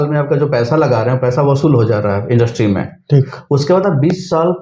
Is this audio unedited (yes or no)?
yes